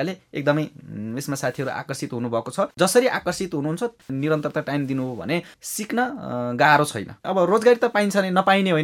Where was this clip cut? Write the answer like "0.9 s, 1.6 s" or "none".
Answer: 2.7 s, 7.2 s